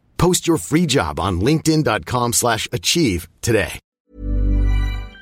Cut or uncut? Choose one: cut